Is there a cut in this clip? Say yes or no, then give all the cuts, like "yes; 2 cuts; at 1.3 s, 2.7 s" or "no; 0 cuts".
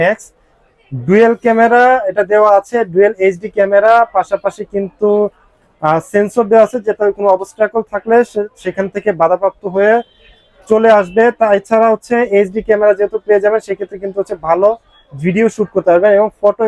no; 0 cuts